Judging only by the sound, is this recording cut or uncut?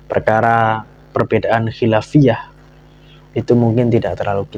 uncut